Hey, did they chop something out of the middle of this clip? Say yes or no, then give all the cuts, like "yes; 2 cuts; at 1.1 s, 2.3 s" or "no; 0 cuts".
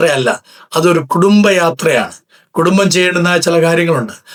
no; 0 cuts